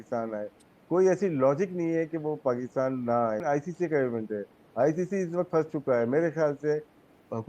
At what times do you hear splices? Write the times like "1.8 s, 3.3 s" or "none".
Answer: 3.4 s